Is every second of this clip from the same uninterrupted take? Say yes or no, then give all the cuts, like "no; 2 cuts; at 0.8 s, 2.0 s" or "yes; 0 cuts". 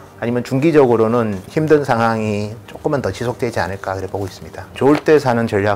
no; 2 cuts; at 1.4 s, 4.7 s